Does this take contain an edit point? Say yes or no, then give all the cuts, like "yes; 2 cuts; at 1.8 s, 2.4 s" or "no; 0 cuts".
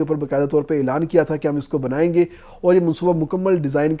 no; 0 cuts